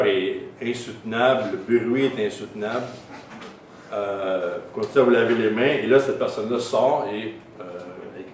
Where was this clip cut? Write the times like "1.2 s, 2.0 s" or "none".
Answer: 4.3 s